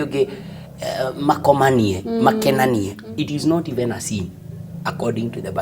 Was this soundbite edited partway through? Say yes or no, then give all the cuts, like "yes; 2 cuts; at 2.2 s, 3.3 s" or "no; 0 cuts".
yes; 1 cut; at 3.0 s